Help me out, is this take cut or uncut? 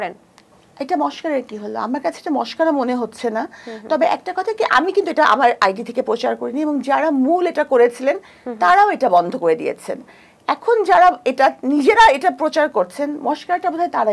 uncut